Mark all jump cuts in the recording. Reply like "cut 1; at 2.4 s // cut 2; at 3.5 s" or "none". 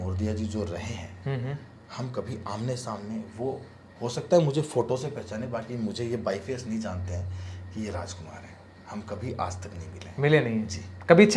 none